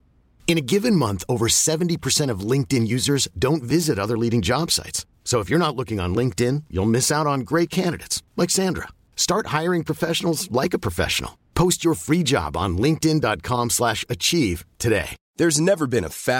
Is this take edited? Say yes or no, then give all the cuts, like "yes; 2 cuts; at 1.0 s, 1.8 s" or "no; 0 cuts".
yes; 1 cut; at 15.2 s